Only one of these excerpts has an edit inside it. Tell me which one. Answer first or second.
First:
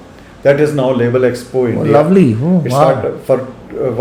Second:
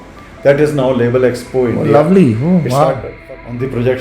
second